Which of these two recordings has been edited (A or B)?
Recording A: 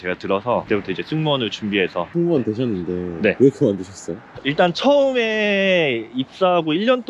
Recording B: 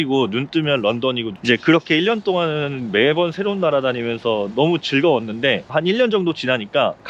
A